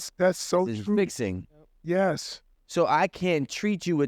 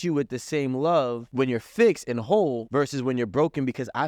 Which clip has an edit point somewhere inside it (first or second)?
second